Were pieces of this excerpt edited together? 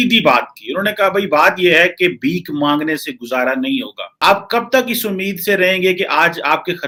no; 0 cuts

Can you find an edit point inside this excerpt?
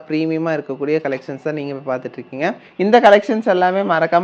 yes; 1 cut; at 2.6 s

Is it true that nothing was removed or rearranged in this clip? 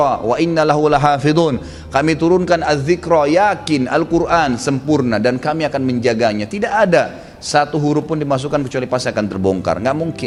yes; 0 cuts

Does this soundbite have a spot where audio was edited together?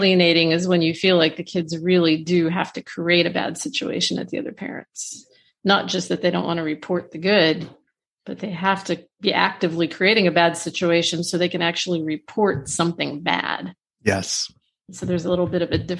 no; 0 cuts

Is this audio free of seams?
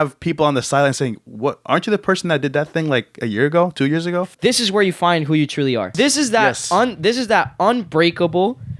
no; 2 cuts; at 4.3 s, 5.9 s

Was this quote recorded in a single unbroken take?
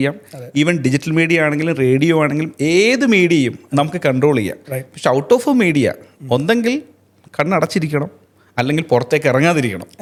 yes; 0 cuts

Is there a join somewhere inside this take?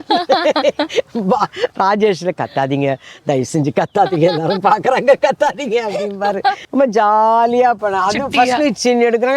yes; 1 cut; at 6.6 s

